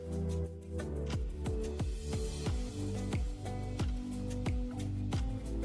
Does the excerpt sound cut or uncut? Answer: uncut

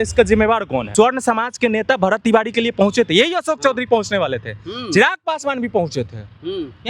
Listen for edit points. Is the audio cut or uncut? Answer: cut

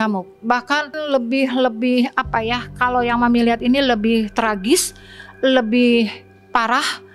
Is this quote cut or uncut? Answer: cut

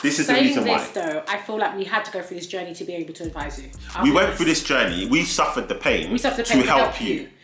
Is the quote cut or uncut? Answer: uncut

